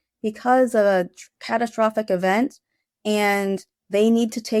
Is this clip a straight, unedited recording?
yes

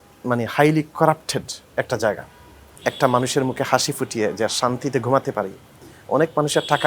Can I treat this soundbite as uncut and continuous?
no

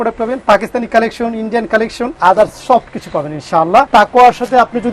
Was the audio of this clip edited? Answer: yes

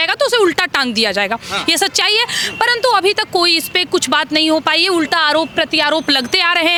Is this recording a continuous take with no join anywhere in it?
yes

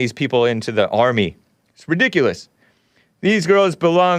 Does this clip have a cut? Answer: no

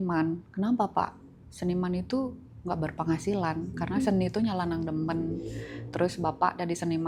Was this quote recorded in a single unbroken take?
yes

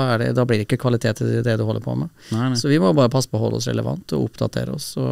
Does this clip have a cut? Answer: no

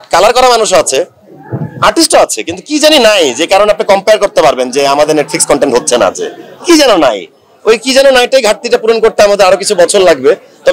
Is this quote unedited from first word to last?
yes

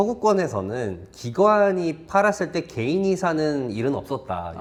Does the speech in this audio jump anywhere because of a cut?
no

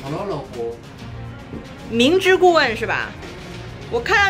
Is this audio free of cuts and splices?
yes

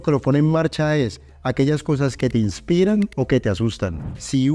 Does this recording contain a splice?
no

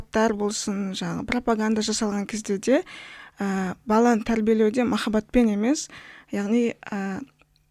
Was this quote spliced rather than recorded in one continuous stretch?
no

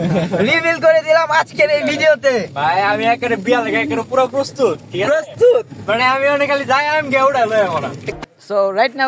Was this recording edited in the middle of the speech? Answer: yes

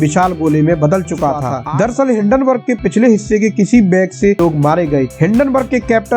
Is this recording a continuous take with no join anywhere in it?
no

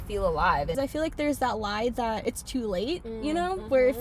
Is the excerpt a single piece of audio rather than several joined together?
no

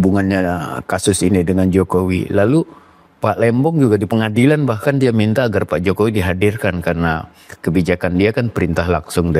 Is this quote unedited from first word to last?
yes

